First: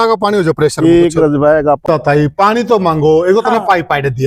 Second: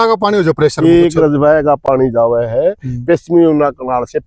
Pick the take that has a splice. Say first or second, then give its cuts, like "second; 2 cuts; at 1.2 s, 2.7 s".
first; 1 cut; at 1.8 s